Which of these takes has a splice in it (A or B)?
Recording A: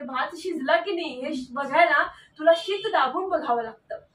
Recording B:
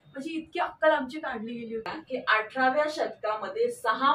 B